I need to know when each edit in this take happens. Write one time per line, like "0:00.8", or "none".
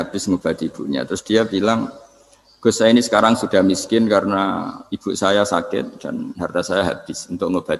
none